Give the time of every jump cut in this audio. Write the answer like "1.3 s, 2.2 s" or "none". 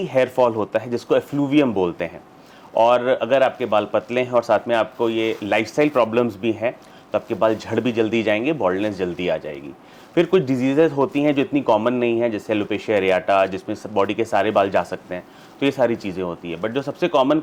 none